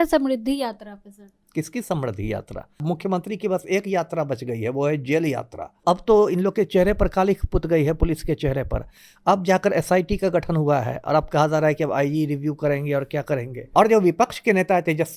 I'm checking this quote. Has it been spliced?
yes; 3 cuts; at 2.8 s, 5.8 s, 13.7 s

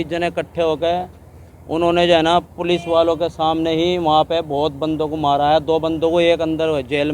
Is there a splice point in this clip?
no; 0 cuts

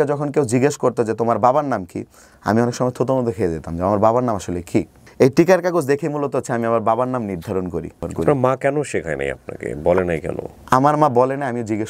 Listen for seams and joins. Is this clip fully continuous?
no; 2 cuts; at 5.0 s, 8.0 s

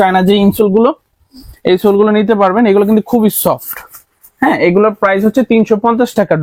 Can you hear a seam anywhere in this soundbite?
no; 0 cuts

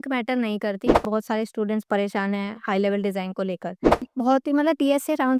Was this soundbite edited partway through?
yes; 2 cuts; at 1.0 s, 4.0 s

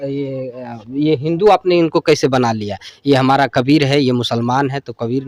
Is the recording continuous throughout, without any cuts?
yes; 0 cuts

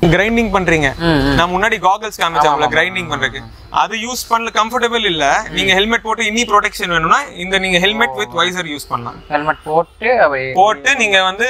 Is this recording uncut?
yes; 0 cuts

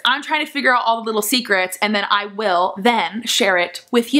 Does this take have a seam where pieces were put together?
no; 0 cuts

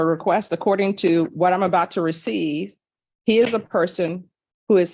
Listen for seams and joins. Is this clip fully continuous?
yes; 0 cuts

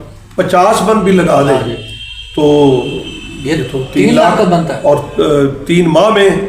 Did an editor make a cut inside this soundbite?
no; 0 cuts

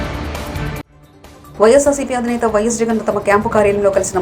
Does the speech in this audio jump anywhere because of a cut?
no; 0 cuts

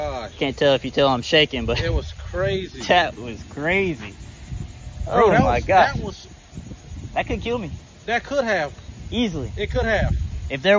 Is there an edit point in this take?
no; 0 cuts

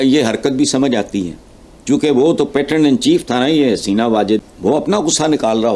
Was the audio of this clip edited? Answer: yes; 1 cut; at 4.5 s

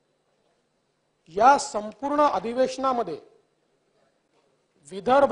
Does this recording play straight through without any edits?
yes; 0 cuts

